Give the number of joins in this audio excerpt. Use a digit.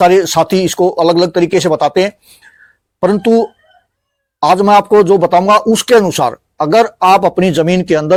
0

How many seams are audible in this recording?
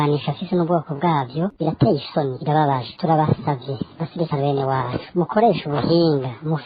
1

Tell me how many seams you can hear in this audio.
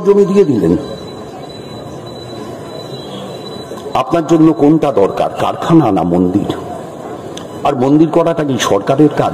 0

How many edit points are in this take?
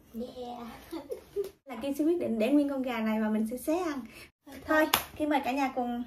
2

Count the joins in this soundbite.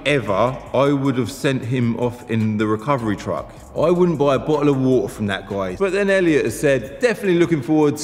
1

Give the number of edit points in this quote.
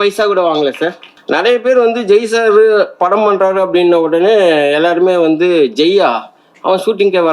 1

